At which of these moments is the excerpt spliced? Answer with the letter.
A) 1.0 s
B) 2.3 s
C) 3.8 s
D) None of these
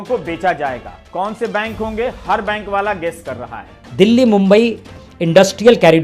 C